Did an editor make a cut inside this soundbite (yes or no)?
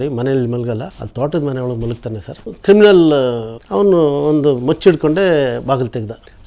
yes